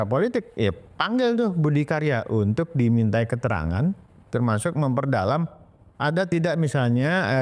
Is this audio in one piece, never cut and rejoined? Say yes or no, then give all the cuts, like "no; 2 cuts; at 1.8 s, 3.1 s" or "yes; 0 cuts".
yes; 0 cuts